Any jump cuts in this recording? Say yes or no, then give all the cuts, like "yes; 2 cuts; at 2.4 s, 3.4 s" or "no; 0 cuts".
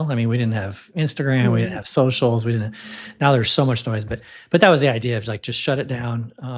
no; 0 cuts